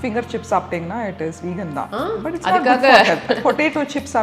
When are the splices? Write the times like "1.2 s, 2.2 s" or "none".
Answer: none